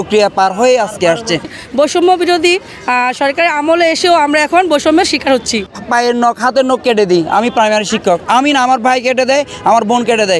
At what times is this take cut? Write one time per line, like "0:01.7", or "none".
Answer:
0:01.5
0:05.8